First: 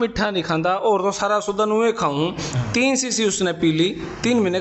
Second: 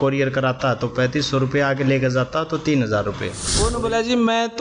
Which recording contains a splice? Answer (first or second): second